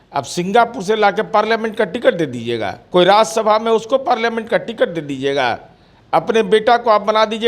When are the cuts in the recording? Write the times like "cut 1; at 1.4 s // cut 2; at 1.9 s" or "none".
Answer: cut 1; at 2.8 s